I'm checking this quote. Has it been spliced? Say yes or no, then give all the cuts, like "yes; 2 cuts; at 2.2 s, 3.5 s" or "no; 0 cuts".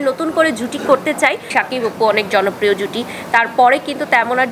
yes; 1 cut; at 1.4 s